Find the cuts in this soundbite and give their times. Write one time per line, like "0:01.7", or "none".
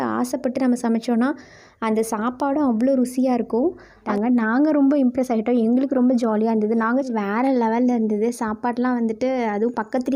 0:04.1
0:07.1